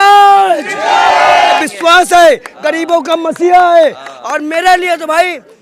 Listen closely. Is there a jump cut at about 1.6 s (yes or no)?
yes